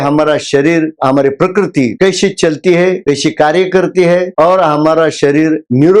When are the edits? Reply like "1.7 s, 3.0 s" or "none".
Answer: 1.0 s